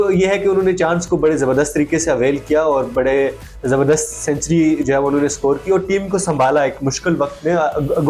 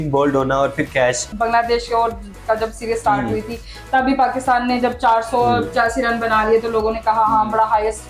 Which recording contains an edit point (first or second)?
second